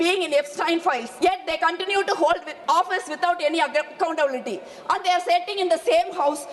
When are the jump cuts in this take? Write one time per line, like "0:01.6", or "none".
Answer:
0:01.1
0:02.5